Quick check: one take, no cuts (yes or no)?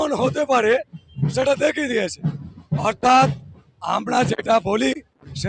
yes